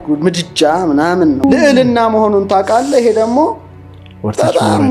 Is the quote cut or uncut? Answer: cut